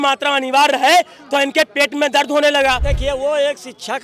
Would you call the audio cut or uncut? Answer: cut